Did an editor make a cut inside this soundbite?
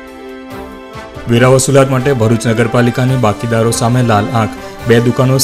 no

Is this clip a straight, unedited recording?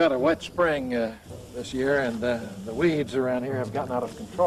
no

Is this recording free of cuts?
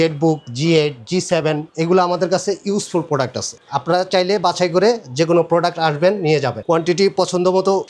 yes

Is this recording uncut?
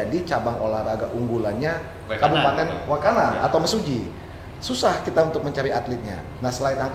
yes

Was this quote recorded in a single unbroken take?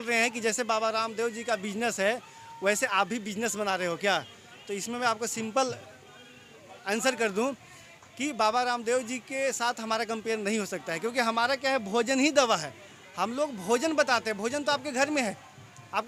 yes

